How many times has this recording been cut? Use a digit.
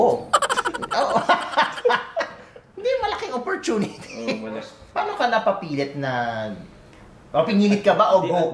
1